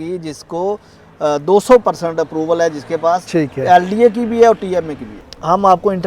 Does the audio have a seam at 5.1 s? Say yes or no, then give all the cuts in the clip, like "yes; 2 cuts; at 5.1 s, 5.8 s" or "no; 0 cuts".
yes; 1 cut; at 5.1 s